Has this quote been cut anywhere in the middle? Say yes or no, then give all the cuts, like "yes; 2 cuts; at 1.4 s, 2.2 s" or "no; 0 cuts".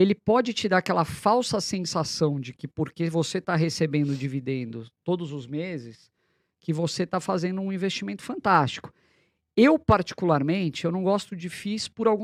no; 0 cuts